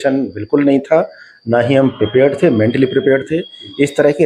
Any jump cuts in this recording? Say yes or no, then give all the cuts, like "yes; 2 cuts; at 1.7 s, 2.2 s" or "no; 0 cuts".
no; 0 cuts